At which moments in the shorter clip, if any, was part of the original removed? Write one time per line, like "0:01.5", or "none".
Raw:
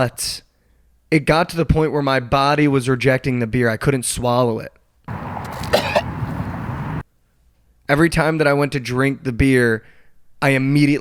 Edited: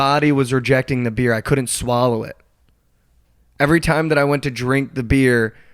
0:02.8